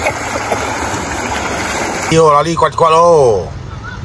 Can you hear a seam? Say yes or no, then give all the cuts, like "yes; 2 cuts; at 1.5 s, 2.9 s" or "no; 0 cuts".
yes; 1 cut; at 2.1 s